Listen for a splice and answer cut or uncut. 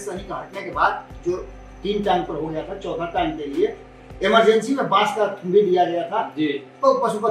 uncut